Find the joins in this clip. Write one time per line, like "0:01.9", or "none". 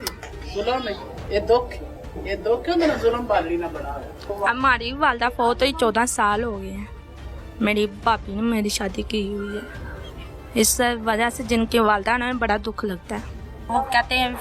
0:04.2
0:13.6